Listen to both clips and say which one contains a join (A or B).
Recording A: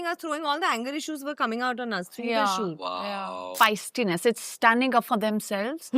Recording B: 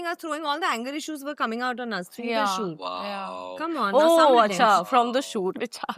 A